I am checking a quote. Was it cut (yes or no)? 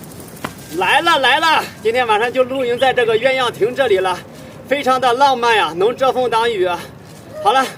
no